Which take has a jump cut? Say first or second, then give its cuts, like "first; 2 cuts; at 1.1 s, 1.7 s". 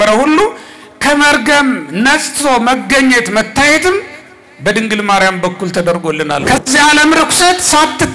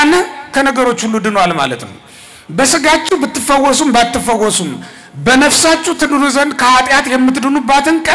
first; 1 cut; at 6.4 s